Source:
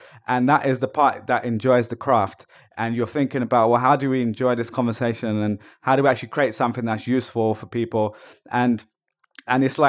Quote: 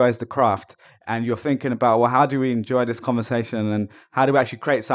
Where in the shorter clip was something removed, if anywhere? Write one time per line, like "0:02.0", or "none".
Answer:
none

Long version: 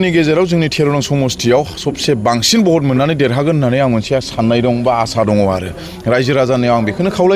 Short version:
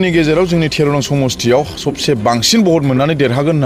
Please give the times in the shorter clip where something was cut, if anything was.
none

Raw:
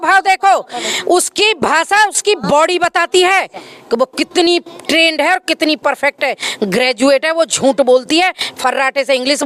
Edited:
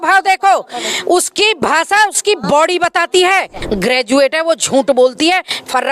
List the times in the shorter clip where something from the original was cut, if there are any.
0:03.6

